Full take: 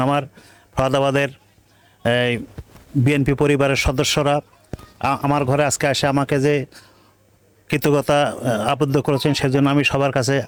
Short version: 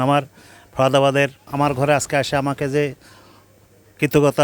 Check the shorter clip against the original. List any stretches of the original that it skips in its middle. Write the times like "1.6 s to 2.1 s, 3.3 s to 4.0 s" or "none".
1.5 s to 5.2 s

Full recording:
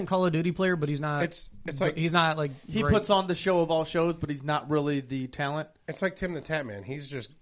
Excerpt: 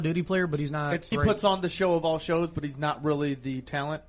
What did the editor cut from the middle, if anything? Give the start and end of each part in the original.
1.3 s to 2.7 s

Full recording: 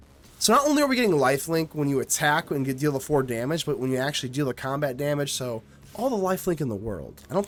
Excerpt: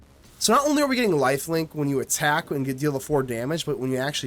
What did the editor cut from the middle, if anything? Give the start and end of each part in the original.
none

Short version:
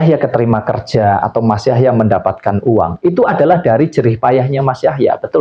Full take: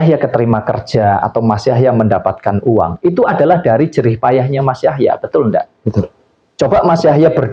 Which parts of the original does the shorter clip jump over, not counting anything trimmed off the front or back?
none

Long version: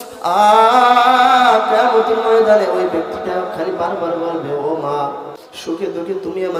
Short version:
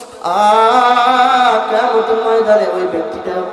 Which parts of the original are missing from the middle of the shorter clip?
none

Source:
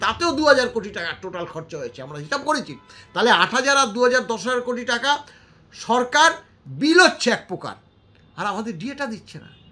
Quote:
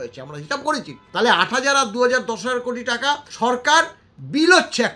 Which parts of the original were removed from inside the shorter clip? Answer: 2.8 s to 3.0 s, 5.3 s to 5.8 s

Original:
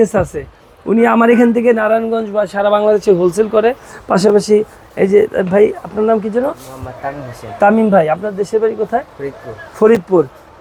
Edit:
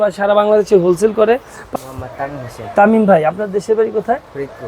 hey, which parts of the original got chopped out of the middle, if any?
4.1 s to 6.5 s

